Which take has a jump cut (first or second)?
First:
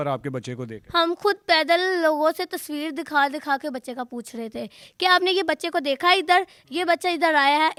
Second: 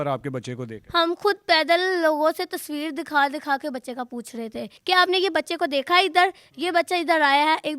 second